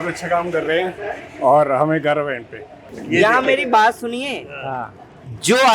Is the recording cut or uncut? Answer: cut